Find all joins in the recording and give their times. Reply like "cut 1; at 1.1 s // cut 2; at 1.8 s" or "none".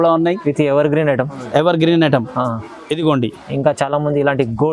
none